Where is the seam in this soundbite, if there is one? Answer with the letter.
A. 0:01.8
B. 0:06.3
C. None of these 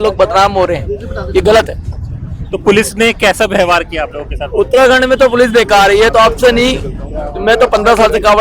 C